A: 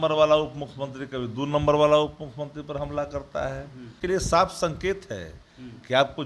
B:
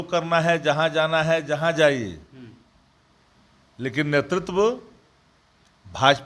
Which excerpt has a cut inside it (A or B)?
A